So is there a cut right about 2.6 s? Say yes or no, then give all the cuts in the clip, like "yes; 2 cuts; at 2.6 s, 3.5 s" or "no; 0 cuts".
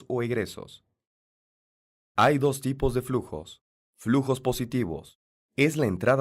yes; 1 cut; at 2.6 s